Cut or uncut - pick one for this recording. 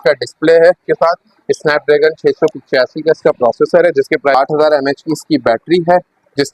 cut